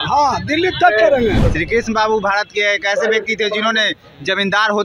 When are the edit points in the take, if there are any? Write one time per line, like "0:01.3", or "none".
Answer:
0:01.4